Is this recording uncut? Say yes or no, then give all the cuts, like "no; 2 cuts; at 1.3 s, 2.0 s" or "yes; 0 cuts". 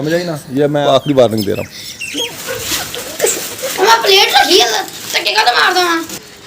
no; 2 cuts; at 0.8 s, 2.3 s